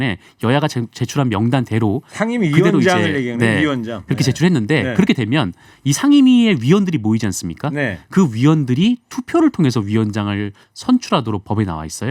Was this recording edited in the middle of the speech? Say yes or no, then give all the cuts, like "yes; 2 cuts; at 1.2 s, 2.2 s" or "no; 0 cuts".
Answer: no; 0 cuts